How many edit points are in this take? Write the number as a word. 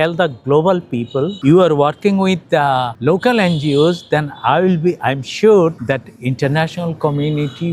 three